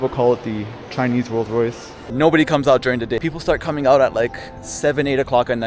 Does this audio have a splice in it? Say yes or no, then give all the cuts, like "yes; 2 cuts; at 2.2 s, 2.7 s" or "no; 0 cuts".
yes; 2 cuts; at 1.9 s, 3.2 s